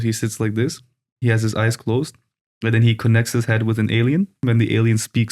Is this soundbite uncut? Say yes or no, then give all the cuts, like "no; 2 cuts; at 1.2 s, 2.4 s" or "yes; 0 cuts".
no; 1 cut; at 4.4 s